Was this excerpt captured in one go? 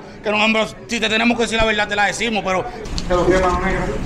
no; 1 cut; at 2.8 s

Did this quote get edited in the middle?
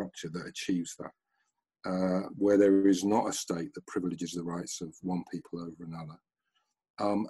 no; 0 cuts

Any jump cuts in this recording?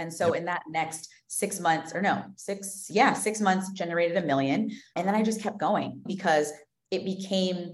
yes; 2 cuts; at 4.9 s, 6.1 s

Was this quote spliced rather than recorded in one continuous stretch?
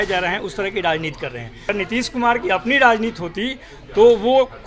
yes; 1 cut; at 1.6 s

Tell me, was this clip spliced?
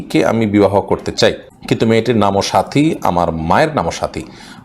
yes; 1 cut; at 1.5 s

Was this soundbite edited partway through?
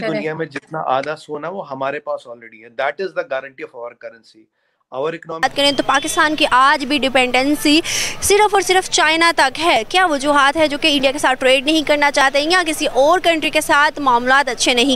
yes; 1 cut; at 5.4 s

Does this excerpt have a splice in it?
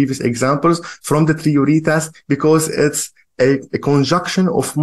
no; 0 cuts

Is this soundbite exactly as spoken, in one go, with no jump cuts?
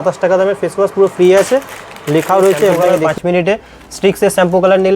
no; 1 cut; at 3.0 s

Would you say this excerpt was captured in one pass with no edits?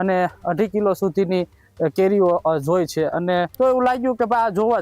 no; 1 cut; at 3.5 s

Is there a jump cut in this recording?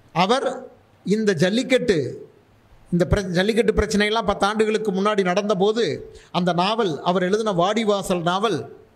no; 0 cuts

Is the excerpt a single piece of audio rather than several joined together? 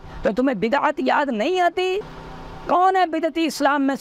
no; 1 cut; at 2.0 s

